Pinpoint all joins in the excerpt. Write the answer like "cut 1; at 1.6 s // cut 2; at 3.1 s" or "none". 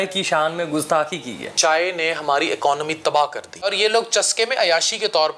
cut 1; at 1.5 s // cut 2; at 3.7 s